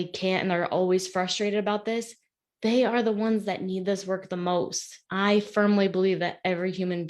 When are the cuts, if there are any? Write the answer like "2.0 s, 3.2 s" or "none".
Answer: 5.0 s